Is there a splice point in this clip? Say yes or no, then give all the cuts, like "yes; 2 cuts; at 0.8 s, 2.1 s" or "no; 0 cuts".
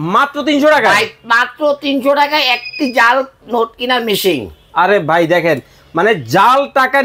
no; 0 cuts